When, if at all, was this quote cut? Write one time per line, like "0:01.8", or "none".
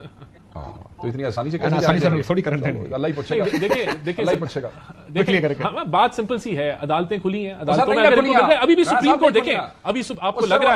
none